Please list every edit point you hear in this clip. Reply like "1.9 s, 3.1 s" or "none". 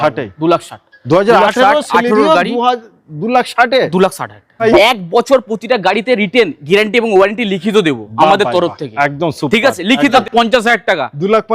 4.6 s, 10.2 s